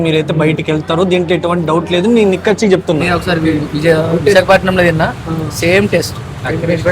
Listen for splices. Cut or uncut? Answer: cut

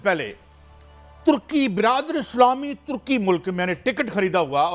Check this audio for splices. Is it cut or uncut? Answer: uncut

